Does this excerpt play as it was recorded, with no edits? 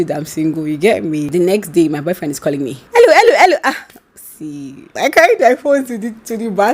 no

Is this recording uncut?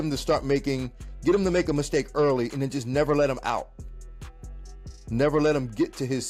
yes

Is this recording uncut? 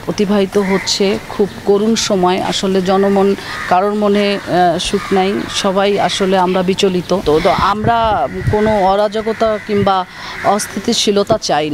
no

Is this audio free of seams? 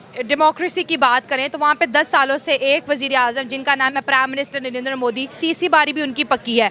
no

